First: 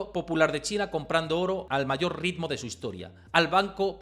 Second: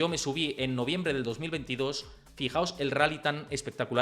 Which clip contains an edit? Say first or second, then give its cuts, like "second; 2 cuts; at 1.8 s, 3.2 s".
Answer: first; 1 cut; at 1.6 s